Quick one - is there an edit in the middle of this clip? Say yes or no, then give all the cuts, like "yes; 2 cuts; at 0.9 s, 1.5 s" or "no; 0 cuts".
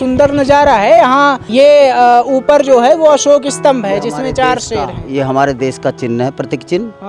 yes; 1 cut; at 1.4 s